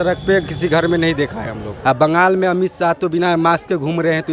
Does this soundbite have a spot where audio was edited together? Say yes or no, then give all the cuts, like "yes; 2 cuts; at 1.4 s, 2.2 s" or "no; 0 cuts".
no; 0 cuts